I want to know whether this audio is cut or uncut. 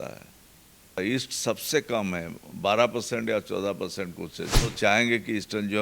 cut